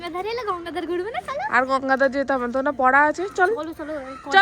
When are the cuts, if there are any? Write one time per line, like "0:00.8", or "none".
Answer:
none